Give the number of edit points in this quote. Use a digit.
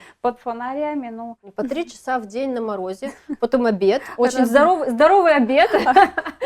1